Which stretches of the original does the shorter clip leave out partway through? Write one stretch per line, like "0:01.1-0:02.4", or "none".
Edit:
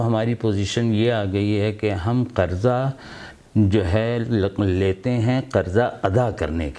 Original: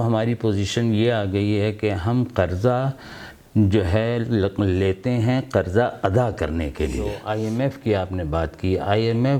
none